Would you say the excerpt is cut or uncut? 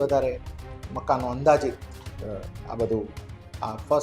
uncut